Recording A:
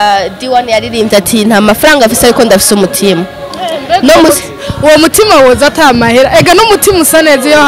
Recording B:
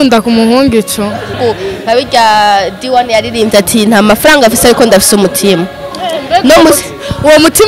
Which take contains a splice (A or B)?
B